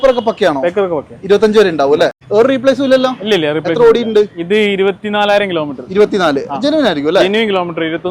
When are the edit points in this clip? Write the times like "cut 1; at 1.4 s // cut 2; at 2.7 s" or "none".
cut 1; at 2.2 s